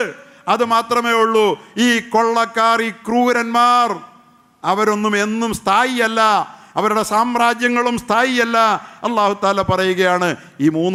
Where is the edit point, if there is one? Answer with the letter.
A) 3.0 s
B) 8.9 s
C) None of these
C